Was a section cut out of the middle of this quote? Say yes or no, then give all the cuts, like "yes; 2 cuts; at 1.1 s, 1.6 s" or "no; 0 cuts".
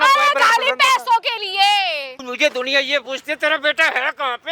yes; 1 cut; at 2.2 s